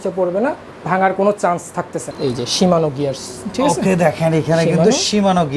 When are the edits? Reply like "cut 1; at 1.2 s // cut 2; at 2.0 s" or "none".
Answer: cut 1; at 2.1 s